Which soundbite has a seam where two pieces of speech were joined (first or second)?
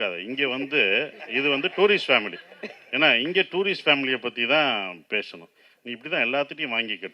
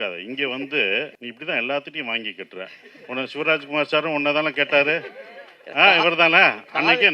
second